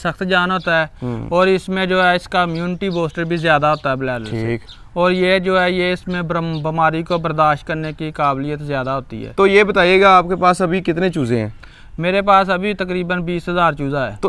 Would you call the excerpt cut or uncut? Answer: uncut